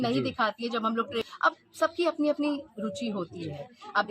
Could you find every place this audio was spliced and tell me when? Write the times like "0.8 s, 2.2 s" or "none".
1.2 s